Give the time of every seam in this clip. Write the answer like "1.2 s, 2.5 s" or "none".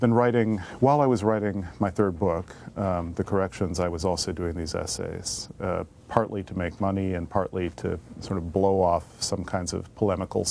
7.7 s